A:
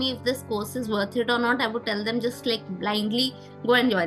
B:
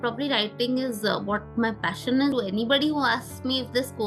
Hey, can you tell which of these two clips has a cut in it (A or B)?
B